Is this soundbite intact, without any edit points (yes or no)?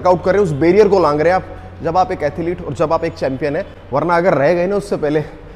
yes